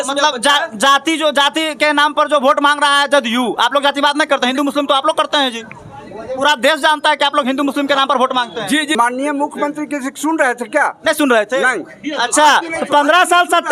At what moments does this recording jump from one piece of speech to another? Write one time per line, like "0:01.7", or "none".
0:09.0